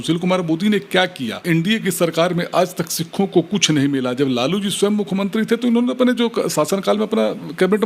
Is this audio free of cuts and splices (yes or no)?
no